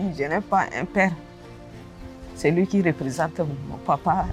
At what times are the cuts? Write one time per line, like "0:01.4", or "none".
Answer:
none